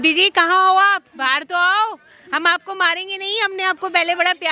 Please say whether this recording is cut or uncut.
uncut